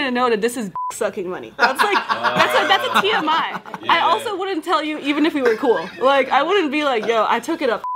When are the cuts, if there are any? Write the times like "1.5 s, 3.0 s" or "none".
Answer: none